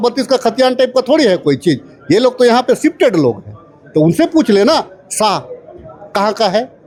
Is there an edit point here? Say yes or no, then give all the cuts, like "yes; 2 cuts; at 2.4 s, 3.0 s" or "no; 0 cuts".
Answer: no; 0 cuts